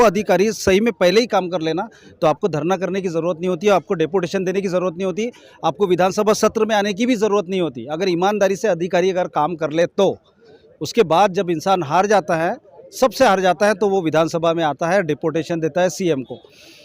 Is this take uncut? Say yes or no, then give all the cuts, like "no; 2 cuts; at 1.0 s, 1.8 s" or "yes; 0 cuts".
yes; 0 cuts